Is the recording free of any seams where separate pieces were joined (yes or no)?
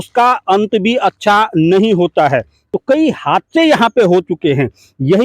no